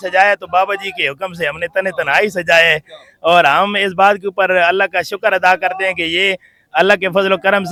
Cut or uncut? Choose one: uncut